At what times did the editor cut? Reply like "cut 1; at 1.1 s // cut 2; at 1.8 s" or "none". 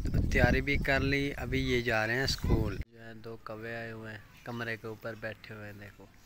cut 1; at 2.8 s